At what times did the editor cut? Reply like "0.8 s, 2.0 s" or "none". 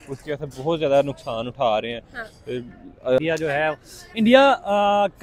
3.2 s